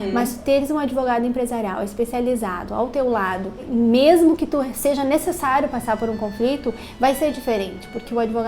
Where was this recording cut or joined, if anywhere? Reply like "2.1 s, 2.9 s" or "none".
3.6 s